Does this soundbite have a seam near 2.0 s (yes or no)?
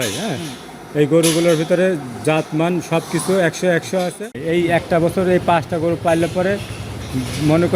no